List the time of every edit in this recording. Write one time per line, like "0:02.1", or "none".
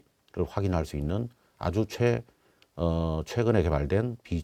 none